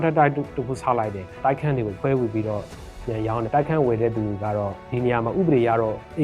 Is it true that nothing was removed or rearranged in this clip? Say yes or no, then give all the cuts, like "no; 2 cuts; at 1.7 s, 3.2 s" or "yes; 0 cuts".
no; 2 cuts; at 1.9 s, 3.5 s